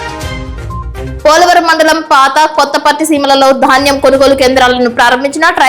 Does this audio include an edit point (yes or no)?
yes